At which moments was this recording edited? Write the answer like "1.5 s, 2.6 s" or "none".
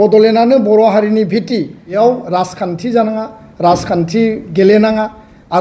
2.0 s